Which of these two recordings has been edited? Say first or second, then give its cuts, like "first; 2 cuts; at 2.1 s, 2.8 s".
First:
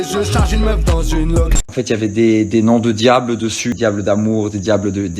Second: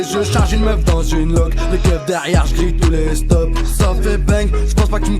first; 2 cuts; at 1.7 s, 3.8 s